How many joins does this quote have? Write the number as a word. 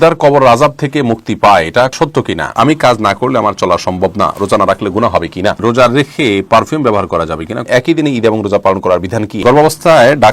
four